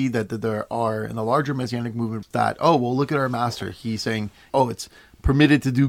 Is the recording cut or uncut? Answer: cut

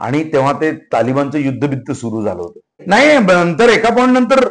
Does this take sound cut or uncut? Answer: cut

